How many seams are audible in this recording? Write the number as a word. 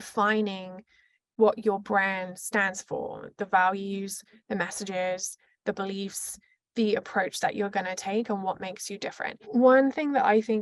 one